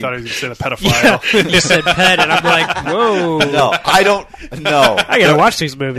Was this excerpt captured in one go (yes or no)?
yes